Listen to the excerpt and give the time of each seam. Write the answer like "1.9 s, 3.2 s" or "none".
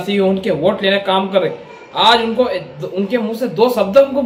none